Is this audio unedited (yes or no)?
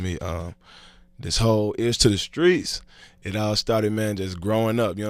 yes